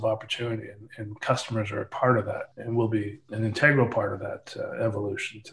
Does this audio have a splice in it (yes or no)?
yes